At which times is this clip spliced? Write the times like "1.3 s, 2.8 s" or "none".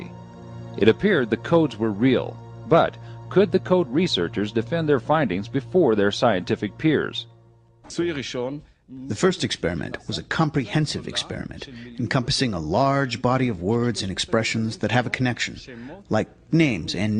5.6 s